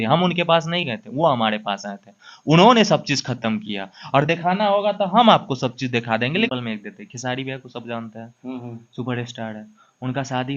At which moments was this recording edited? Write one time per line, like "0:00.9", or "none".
0:06.5

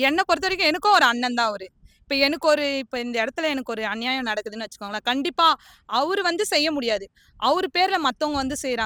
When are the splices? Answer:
none

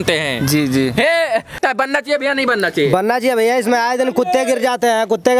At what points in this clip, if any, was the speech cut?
0:01.5

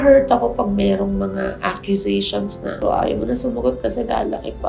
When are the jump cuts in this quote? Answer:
0:02.8

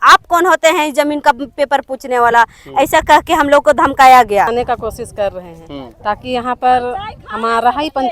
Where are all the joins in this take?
0:04.5

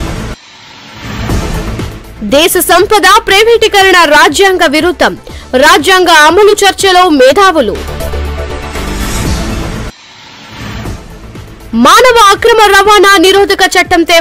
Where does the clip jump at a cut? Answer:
0:07.3
0:10.8

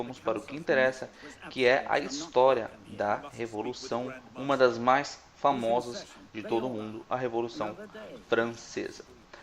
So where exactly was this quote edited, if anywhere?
0:03.3

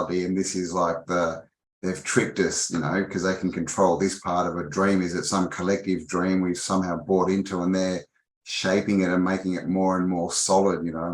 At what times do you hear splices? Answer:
none

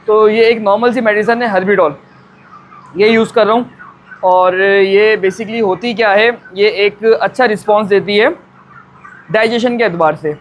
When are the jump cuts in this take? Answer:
none

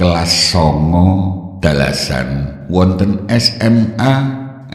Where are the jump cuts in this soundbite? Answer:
0:01.4
0:02.5
0:03.8

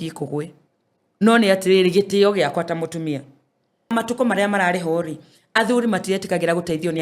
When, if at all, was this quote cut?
0:03.9

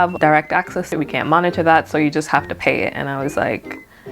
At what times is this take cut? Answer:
0:00.9

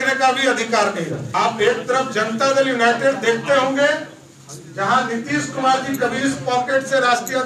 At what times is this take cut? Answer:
0:01.2

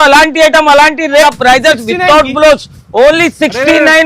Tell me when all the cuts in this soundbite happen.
0:01.2

